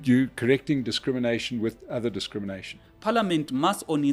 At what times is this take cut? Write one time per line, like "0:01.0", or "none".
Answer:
0:02.8